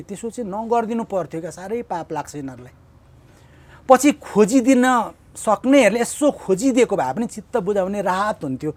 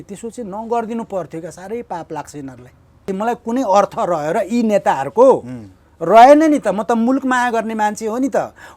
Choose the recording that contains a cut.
second; 1 cut; at 3.1 s

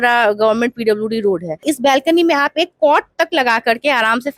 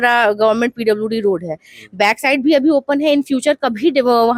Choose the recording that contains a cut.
first; 1 cut; at 1.6 s

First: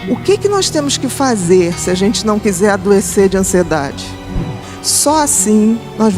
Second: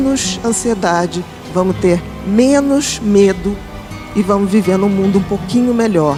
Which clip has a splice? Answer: first; 1 cut; at 4.5 s

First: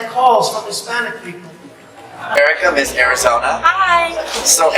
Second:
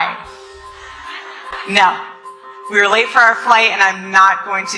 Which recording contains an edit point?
first; 1 cut; at 2.2 s

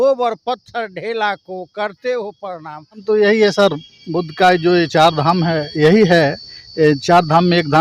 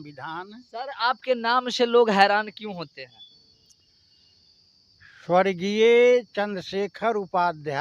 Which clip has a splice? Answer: first; 1 cut; at 3.0 s

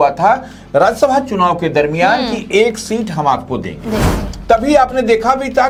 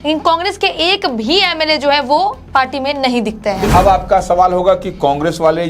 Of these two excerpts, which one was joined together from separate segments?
second; 1 cut; at 3.7 s

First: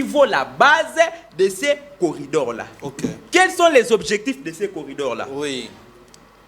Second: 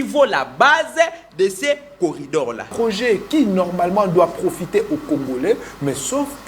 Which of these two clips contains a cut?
second; 1 cut; at 2.7 s

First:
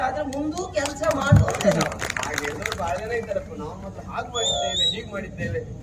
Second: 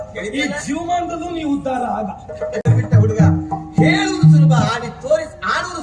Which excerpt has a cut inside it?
second; 1 cut; at 2.6 s

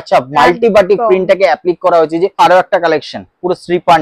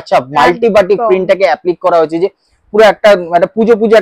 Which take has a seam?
first; 1 cut; at 2.4 s

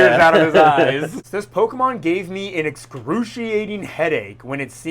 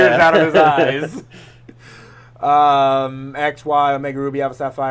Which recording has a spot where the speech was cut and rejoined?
first; 1 cut; at 1.2 s

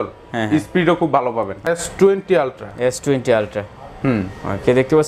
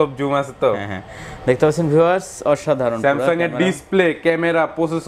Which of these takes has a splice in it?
first; 1 cut; at 1.7 s

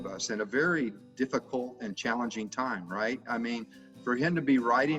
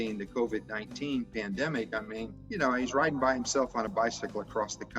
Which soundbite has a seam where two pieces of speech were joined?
second; 1 cut; at 1.9 s

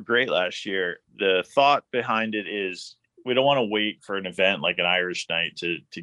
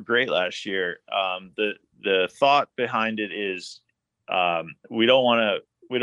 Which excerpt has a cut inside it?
first; 2 cuts; at 1.0 s, 3.1 s

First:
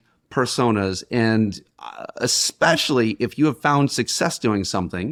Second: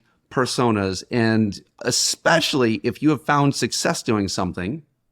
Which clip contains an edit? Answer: second; 1 cut; at 1.7 s

